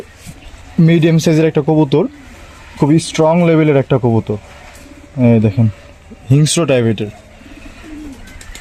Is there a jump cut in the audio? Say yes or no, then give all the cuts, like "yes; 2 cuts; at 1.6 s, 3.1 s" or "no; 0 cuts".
no; 0 cuts